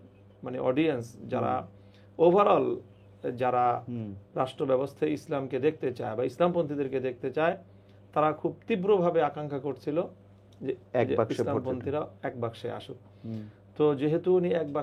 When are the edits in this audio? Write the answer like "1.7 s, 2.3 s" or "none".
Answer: none